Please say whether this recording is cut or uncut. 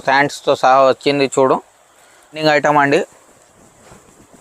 cut